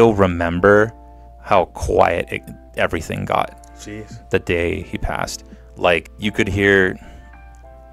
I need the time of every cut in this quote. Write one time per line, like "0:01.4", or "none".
0:06.1